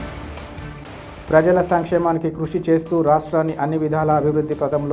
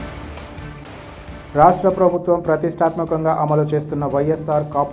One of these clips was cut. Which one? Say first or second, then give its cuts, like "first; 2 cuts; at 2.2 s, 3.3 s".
first; 1 cut; at 1.1 s